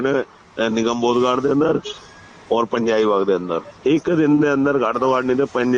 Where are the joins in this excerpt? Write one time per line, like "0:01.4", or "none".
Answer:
0:03.7